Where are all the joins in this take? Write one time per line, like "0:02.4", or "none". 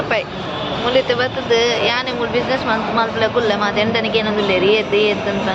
none